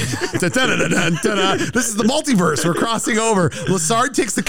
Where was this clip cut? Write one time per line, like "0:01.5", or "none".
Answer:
none